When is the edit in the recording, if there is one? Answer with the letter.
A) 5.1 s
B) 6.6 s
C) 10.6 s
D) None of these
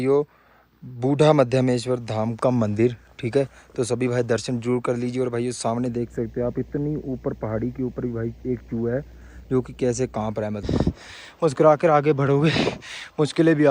C